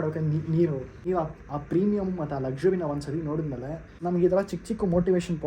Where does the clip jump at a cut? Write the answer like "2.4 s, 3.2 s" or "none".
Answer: 0.9 s, 3.9 s